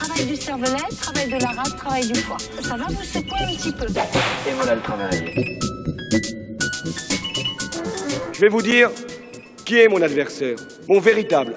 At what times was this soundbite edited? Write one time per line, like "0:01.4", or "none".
0:07.9